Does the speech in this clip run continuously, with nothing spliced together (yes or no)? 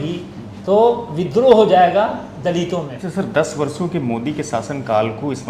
no